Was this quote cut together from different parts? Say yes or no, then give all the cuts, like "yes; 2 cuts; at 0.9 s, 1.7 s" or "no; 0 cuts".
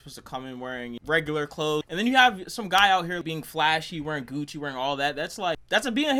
no; 0 cuts